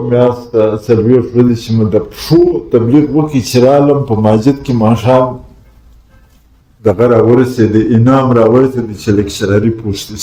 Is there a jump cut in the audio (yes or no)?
no